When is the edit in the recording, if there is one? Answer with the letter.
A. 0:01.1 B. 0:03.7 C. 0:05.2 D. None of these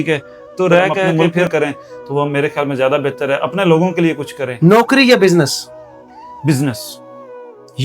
A